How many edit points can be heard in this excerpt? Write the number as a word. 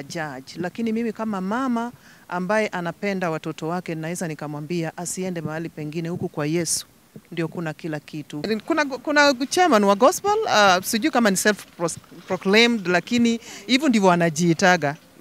one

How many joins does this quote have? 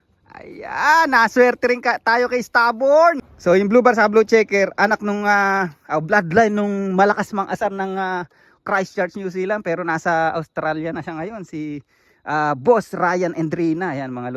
one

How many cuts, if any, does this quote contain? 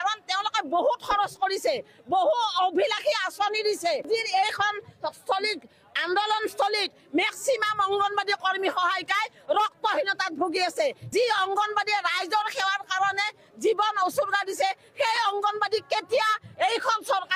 two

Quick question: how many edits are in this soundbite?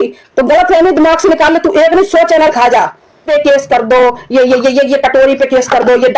one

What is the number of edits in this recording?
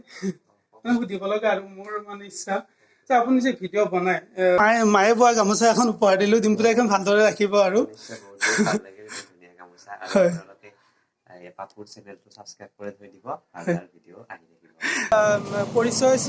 two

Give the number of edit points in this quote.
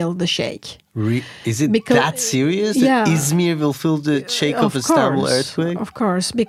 zero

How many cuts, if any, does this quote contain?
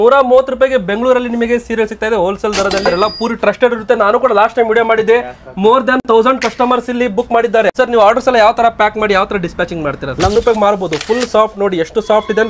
two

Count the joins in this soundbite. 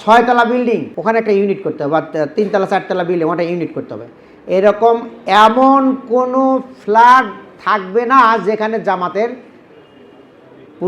one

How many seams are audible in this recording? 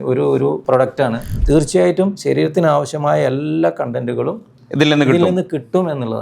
one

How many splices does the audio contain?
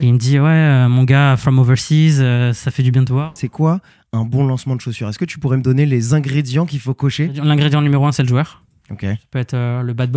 three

